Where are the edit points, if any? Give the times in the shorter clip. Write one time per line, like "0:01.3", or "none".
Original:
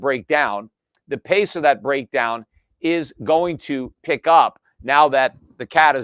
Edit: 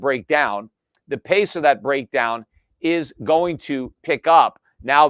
none